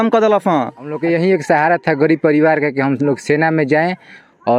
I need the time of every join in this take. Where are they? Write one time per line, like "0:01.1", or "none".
0:01.0